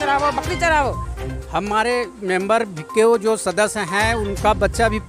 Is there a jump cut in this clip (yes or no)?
yes